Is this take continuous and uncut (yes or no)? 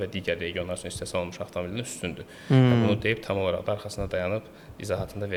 yes